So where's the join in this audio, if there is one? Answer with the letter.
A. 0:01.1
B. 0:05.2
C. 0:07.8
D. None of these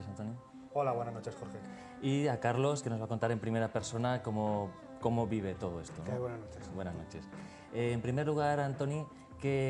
D